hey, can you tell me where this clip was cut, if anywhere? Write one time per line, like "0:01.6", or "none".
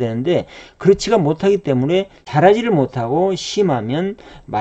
0:02.2